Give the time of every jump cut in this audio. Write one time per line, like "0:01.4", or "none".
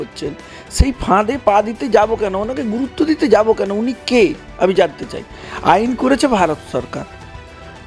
none